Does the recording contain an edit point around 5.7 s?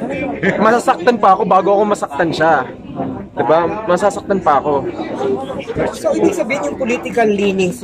yes; 1 cut; at 5.7 s

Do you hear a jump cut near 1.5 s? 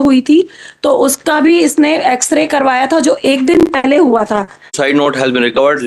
no; 1 cut; at 4.8 s

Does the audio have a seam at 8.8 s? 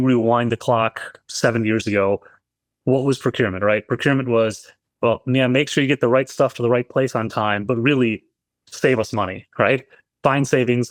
no; 0 cuts

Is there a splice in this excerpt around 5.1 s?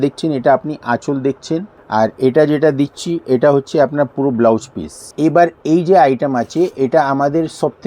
yes; 2 cuts; at 1.7 s, 5.1 s

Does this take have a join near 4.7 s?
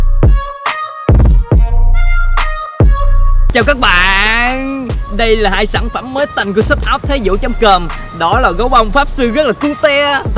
no; 1 cut; at 3.5 s

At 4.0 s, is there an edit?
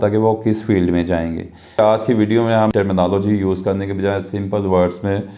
no; 1 cut; at 1.8 s

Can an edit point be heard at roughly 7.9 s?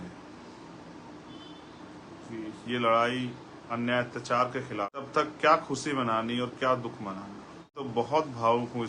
yes; 2 cuts; at 5.1 s, 7.9 s

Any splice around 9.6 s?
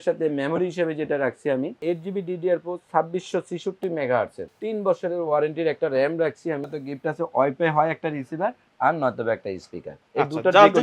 no; 3 cuts; at 1.8 s, 4.4 s, 6.7 s

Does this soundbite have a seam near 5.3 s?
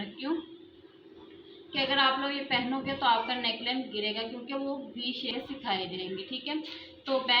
yes; 1 cut; at 5.3 s

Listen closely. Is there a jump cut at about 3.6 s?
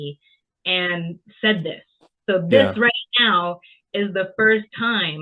no; 0 cuts

